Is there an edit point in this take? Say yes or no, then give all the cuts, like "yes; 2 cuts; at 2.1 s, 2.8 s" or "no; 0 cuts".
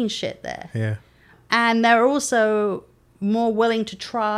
yes; 1 cut; at 1.4 s